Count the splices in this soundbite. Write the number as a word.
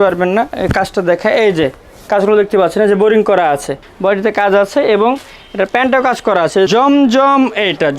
two